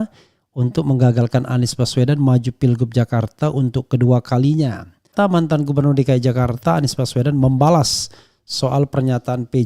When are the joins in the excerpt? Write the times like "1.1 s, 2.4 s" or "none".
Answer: 5.1 s